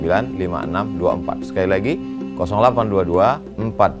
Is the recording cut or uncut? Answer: uncut